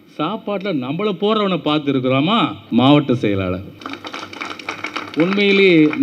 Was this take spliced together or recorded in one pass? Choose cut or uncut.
cut